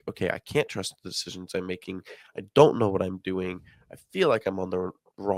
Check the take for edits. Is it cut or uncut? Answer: uncut